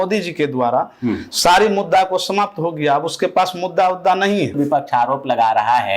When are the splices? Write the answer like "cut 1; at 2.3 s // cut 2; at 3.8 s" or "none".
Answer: cut 1; at 4.5 s